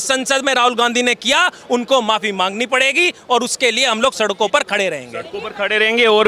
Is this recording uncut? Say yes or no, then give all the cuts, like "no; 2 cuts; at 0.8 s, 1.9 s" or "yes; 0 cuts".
yes; 0 cuts